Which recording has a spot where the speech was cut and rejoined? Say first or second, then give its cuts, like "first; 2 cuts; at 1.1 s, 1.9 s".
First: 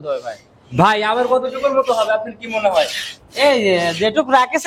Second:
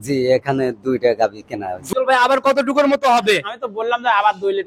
second; 1 cut; at 1.8 s